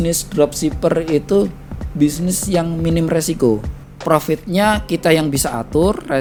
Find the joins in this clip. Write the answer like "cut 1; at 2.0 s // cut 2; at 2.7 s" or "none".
none